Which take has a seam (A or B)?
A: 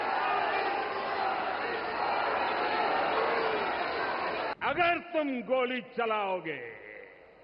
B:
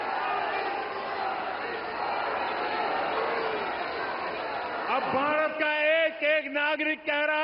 A